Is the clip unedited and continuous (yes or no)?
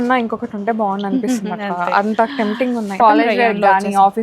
no